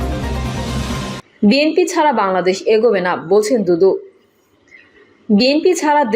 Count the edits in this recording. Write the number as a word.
one